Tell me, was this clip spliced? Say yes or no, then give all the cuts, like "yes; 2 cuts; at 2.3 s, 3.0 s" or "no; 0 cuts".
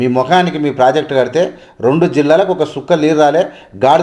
no; 0 cuts